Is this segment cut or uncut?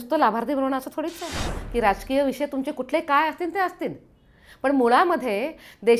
cut